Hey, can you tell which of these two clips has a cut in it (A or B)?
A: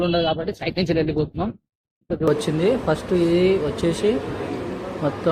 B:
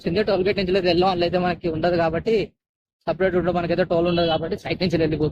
A